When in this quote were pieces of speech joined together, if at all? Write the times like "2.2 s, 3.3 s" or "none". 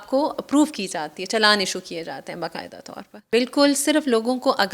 3.1 s